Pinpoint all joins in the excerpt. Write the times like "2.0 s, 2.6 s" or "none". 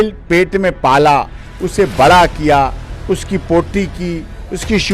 none